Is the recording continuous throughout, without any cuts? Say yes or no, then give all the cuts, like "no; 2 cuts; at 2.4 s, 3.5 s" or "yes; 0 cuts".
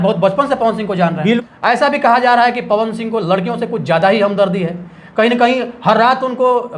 no; 1 cut; at 1.4 s